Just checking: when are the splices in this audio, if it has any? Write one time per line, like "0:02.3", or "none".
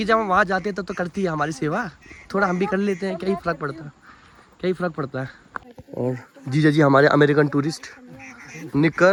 none

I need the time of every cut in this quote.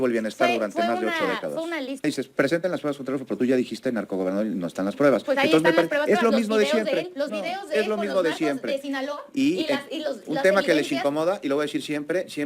0:02.0

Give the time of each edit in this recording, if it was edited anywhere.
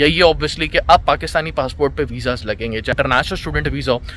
0:02.9

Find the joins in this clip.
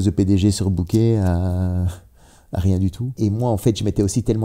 0:03.1

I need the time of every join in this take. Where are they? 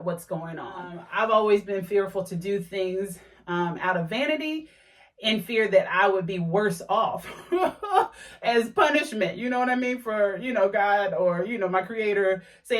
0:01.0

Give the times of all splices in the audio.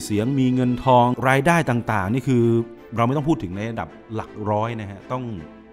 0:01.2

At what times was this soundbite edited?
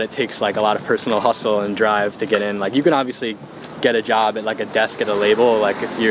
none

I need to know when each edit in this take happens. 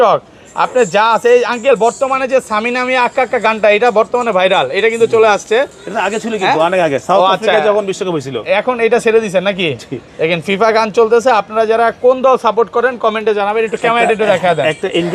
none

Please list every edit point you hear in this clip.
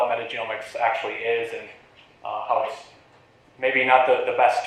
0:01.0

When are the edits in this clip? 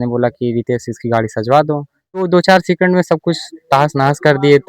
0:02.3

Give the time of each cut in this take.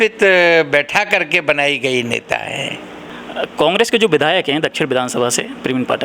0:03.1

